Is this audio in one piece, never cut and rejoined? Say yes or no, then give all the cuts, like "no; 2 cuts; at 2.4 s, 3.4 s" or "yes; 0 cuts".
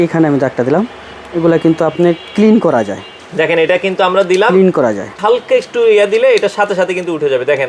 no; 1 cut; at 5.2 s